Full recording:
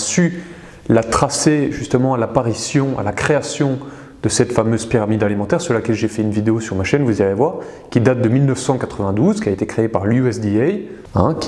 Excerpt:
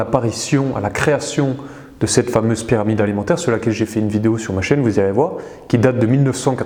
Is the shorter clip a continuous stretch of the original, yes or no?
yes